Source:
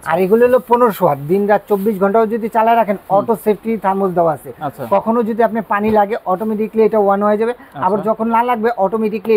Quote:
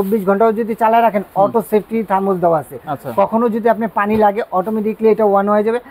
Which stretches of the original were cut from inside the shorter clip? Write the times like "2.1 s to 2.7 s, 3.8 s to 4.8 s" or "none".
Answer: none